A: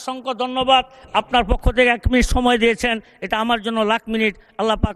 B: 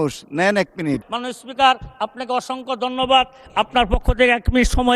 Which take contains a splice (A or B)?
B